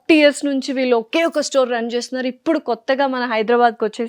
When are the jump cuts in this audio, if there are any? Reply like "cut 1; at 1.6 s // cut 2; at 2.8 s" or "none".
none